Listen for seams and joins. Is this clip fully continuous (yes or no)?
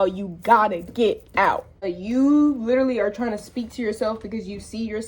no